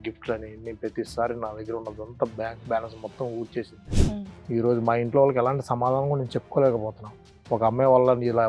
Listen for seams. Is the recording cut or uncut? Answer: cut